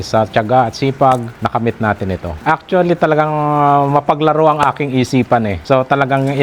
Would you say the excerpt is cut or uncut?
uncut